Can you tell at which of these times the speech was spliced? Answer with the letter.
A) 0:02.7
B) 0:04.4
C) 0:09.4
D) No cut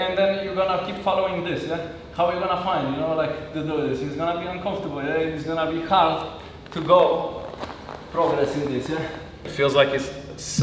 C